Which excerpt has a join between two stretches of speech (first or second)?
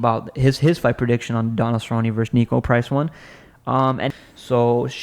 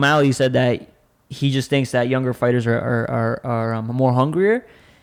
first